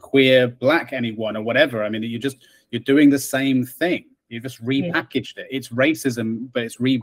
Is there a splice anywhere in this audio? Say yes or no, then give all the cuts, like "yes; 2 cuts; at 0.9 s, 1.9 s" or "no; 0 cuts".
no; 0 cuts